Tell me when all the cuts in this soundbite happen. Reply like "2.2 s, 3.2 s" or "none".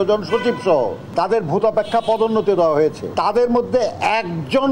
1.0 s, 3.0 s